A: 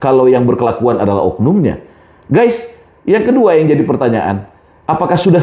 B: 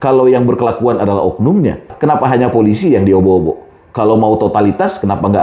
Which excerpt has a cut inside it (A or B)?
B